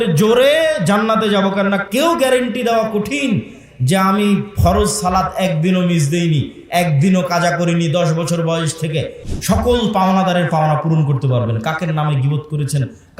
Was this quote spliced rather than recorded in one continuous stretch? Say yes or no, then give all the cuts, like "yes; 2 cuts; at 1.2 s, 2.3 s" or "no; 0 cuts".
yes; 1 cut; at 9.2 s